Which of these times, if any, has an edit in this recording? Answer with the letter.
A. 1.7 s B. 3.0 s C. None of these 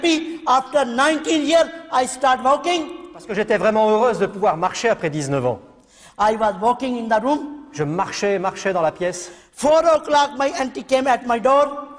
C